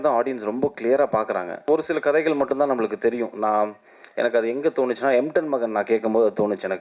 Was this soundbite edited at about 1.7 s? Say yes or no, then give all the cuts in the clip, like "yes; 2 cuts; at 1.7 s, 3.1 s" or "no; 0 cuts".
yes; 1 cut; at 1.7 s